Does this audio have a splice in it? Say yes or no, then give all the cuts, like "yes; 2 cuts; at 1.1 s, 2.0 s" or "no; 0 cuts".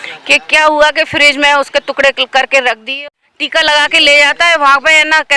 yes; 1 cut; at 3.0 s